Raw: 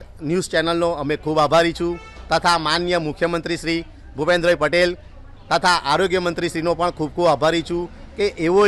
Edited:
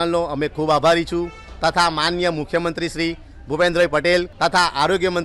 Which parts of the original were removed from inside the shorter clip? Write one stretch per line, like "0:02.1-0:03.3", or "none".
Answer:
0:05.0-0:05.4